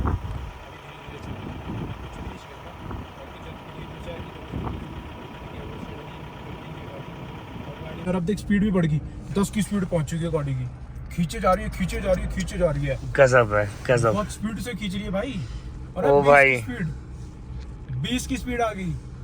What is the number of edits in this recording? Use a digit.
1